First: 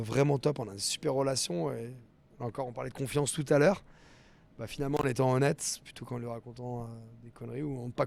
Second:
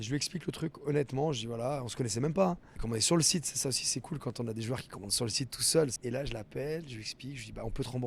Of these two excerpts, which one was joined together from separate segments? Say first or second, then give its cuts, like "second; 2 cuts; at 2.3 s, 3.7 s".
second; 2 cuts; at 2.7 s, 6.0 s